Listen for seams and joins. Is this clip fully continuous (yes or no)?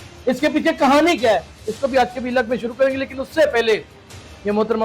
yes